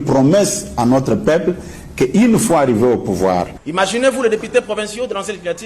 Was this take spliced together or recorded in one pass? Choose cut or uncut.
cut